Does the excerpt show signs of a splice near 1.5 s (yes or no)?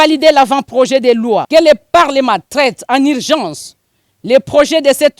yes